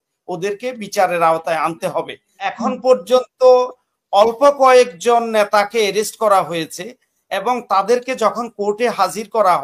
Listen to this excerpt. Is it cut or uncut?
cut